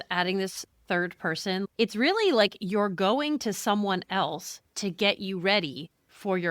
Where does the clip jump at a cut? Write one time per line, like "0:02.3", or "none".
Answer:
0:01.7